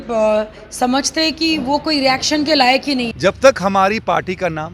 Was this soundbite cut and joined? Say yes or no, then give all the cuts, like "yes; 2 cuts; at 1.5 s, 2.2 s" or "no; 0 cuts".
yes; 1 cut; at 3.1 s